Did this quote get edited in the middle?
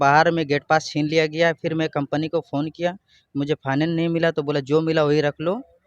no; 0 cuts

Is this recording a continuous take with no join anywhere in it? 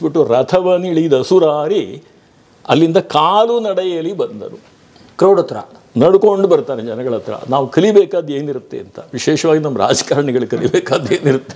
yes; 0 cuts

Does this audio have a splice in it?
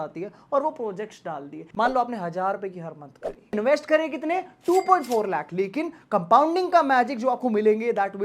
yes; 2 cuts; at 1.6 s, 3.5 s

